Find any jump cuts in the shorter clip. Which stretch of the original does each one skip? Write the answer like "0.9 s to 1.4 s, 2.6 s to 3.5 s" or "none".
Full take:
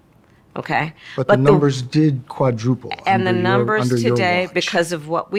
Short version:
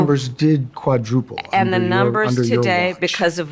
none